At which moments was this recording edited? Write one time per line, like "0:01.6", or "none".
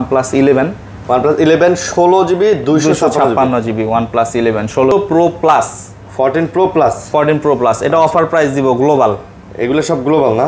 0:04.9